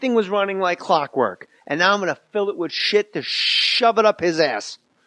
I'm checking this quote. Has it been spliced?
yes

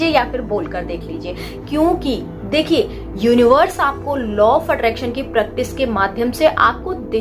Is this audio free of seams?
yes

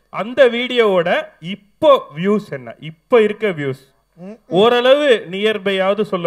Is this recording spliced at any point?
no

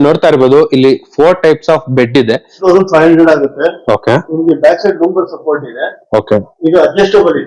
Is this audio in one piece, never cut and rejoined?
no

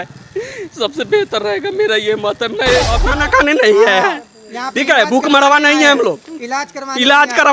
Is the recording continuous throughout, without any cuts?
no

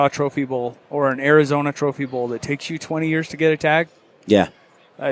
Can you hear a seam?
no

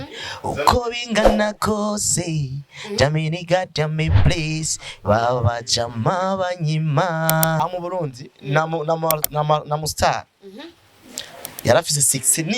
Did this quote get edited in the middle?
yes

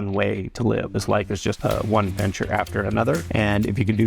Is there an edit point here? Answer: yes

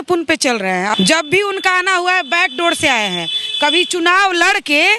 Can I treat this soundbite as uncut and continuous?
no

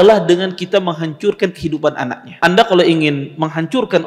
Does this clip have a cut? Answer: yes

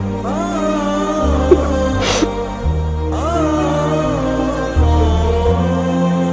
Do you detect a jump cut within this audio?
no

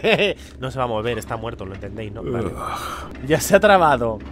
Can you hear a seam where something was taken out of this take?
yes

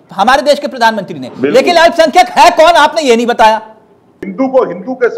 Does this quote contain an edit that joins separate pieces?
yes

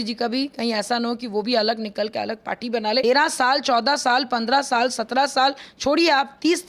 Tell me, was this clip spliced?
yes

